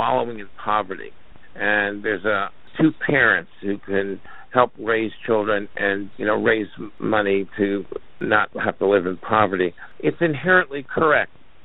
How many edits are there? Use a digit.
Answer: 5